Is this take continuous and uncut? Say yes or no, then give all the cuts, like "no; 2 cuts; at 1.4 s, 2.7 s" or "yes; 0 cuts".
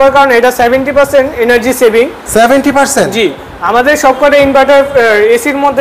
yes; 0 cuts